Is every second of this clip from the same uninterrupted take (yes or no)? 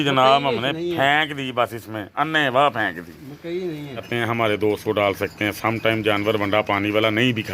no